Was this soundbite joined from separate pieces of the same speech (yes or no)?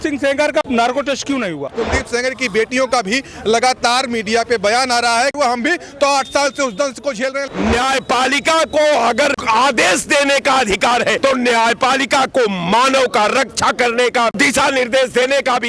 yes